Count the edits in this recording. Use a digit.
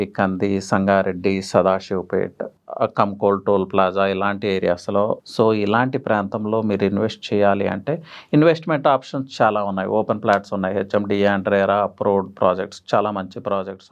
2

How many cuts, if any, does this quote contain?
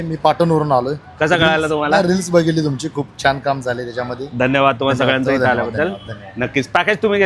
0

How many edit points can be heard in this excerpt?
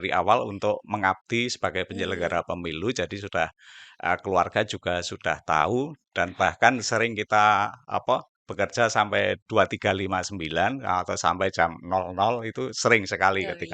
0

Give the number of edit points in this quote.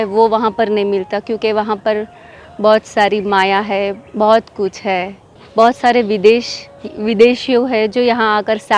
1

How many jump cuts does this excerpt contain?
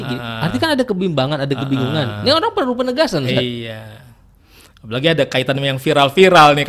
0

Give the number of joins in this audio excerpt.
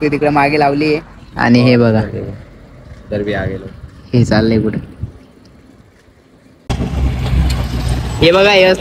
1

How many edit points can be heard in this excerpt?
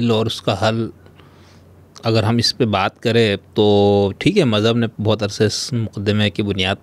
0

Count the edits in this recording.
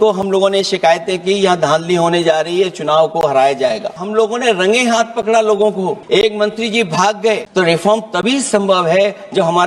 3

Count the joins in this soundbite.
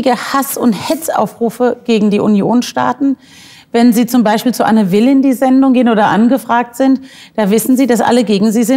0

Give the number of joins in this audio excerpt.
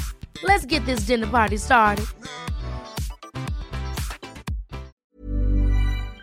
1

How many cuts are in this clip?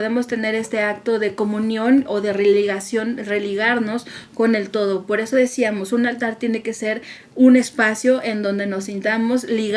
0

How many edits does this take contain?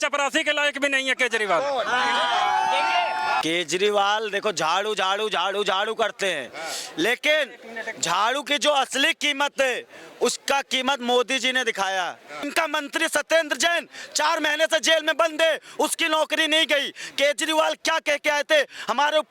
2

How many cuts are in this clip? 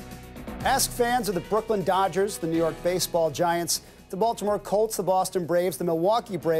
1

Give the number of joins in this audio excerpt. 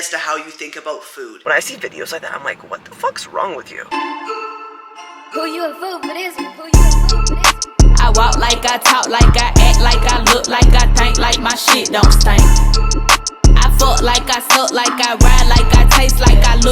2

